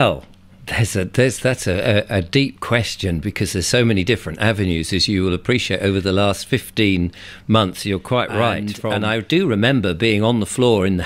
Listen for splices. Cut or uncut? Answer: cut